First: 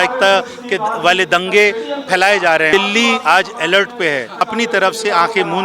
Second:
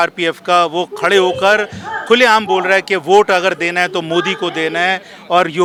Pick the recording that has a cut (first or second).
first